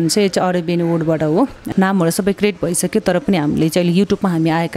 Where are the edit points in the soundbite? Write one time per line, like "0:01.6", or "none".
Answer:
0:01.6